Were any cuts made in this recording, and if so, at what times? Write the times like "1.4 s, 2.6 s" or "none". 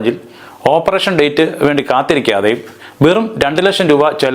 none